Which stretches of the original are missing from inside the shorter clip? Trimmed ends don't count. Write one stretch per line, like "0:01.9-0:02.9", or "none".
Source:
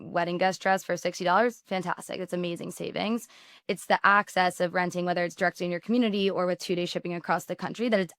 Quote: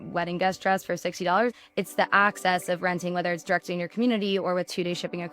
0:01.6-0:03.5